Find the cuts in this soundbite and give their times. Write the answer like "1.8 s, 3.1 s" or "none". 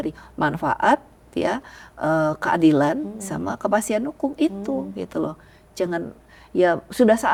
none